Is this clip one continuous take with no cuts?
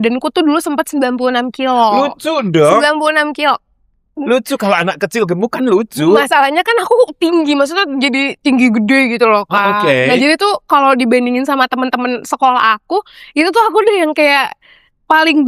yes; 0 cuts

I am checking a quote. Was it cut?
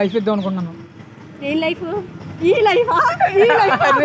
yes; 1 cut; at 2.2 s

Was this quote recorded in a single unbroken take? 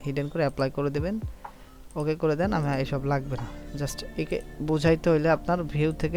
yes; 0 cuts

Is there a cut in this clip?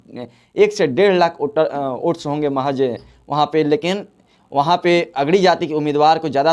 no; 0 cuts

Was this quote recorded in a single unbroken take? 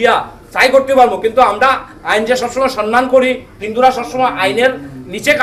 yes; 0 cuts

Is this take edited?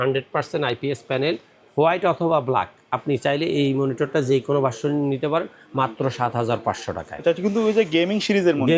no; 0 cuts

